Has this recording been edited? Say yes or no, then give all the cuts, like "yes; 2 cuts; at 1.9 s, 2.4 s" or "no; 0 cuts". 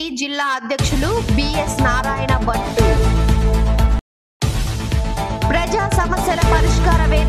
no; 0 cuts